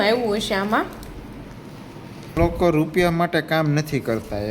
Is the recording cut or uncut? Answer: cut